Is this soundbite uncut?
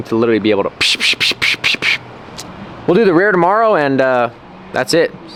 yes; 0 cuts

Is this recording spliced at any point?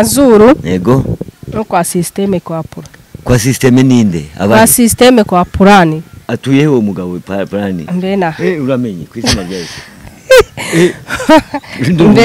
no; 0 cuts

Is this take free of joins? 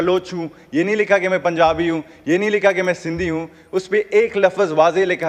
yes; 0 cuts

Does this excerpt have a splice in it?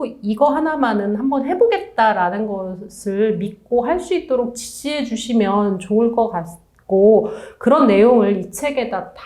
no; 0 cuts

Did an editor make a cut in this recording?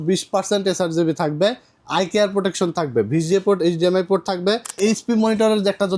yes; 1 cut; at 4.8 s

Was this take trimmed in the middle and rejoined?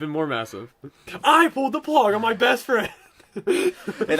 yes; 1 cut; at 1.0 s

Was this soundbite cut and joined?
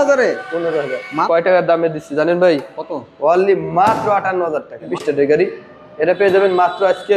yes; 2 cuts; at 1.1 s, 4.9 s

